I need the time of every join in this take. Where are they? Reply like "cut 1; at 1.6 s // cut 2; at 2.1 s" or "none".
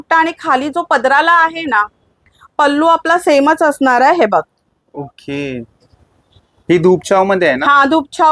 cut 1; at 2.3 s